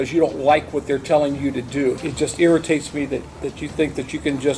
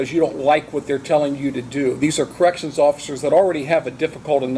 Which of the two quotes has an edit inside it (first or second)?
first